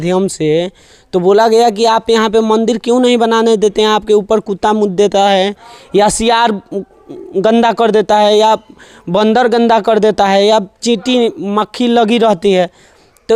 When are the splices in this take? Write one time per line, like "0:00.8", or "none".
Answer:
none